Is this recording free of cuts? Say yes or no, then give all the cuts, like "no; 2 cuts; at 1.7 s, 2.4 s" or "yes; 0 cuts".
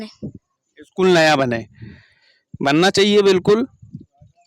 yes; 0 cuts